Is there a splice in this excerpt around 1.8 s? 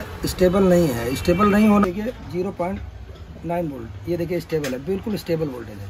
yes; 1 cut; at 1.8 s

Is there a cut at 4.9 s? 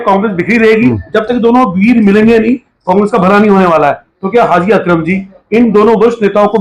no; 1 cut; at 0.9 s

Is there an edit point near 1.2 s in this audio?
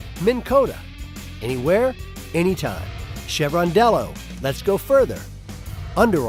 no; 0 cuts

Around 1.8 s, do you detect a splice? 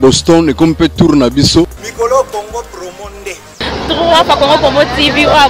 yes; 1 cut; at 1.8 s

